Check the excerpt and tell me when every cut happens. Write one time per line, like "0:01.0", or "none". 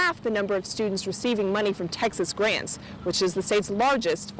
none